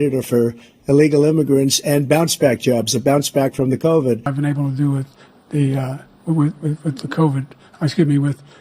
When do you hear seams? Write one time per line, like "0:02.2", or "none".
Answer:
0:04.3